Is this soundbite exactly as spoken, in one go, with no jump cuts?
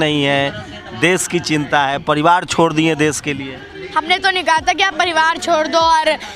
yes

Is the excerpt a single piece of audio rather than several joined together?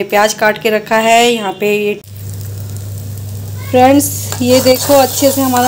no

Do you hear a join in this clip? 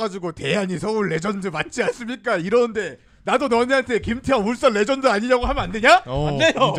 no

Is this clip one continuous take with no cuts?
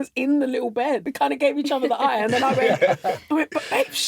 no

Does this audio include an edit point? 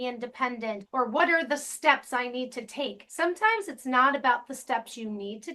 yes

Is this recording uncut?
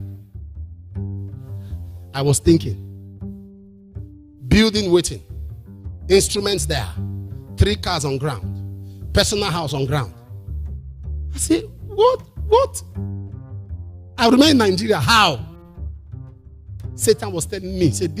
no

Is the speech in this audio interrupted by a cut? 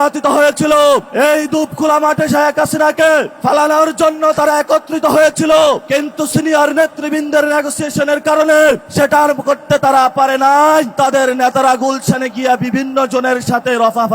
yes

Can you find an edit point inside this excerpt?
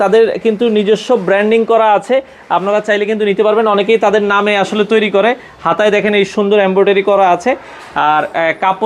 no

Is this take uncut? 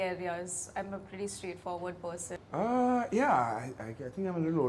no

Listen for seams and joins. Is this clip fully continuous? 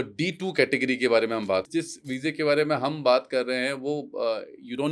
no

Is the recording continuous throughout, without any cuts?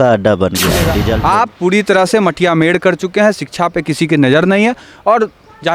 no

